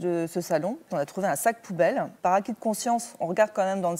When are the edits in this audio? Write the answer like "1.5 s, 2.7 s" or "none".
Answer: 0.9 s, 2.1 s